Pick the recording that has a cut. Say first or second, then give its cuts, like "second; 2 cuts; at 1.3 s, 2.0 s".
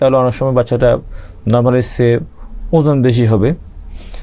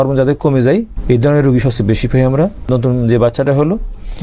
second; 2 cuts; at 0.9 s, 2.7 s